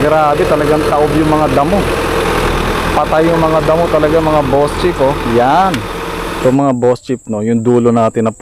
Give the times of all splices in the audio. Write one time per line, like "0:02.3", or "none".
0:06.3